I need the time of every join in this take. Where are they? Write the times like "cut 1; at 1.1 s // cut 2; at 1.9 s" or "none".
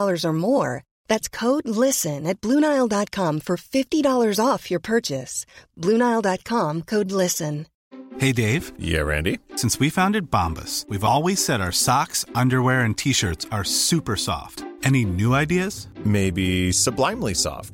cut 1; at 7.7 s